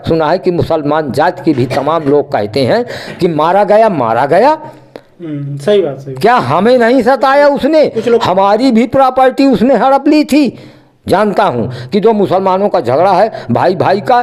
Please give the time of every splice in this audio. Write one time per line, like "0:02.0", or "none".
none

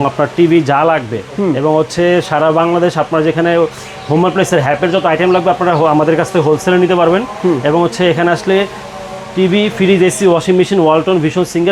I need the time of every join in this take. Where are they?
none

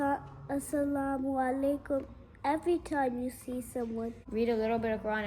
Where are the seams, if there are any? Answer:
0:04.2

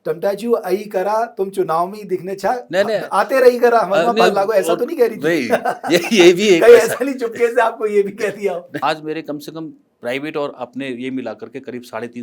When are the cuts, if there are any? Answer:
0:08.8

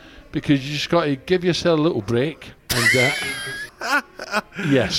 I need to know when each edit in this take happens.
0:03.7

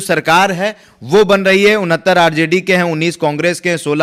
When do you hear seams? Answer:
none

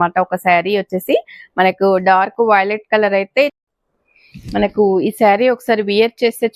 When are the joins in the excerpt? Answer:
0:03.6

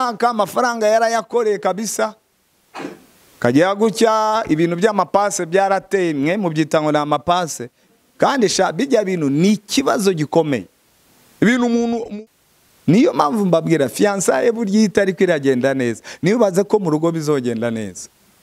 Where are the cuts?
0:12.1

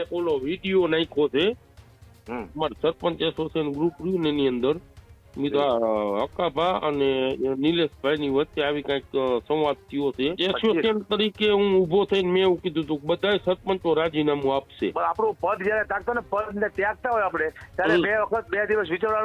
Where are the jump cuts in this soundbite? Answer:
0:10.4
0:14.9

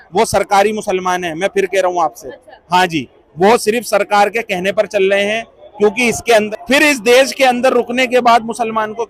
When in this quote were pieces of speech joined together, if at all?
0:06.5

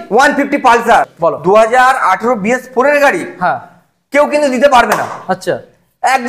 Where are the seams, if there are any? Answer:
0:01.1

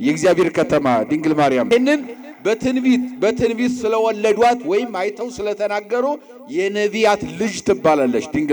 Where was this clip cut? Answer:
0:01.7

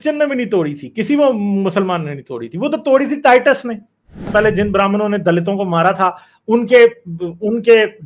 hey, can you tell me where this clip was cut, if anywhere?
0:04.3

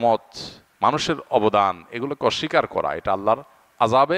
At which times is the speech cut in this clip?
none

